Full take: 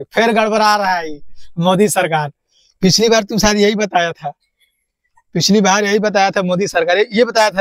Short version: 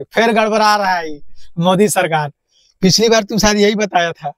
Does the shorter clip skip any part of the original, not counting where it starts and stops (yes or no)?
no